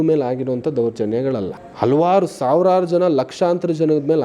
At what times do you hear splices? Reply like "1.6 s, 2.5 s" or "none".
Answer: 1.6 s